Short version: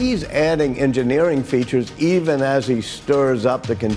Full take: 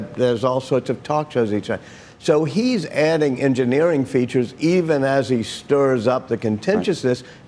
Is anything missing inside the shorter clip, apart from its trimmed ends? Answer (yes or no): no